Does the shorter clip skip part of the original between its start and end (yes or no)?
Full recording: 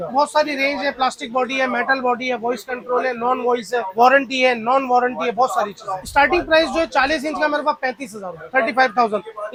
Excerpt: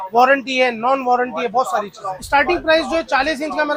no